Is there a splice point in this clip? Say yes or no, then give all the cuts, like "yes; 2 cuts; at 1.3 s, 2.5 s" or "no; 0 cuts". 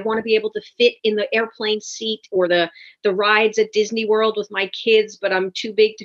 no; 0 cuts